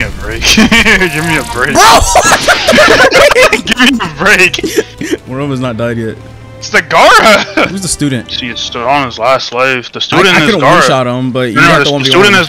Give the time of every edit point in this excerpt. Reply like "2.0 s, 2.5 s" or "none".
5.3 s, 7.8 s